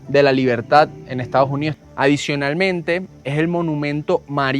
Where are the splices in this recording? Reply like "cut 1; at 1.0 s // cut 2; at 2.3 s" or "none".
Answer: cut 1; at 1.8 s